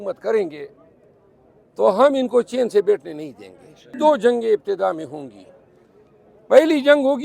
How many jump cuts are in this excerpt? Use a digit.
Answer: 1